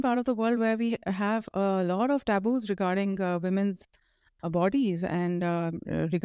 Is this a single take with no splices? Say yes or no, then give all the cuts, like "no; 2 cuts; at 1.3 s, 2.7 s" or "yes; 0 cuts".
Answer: yes; 0 cuts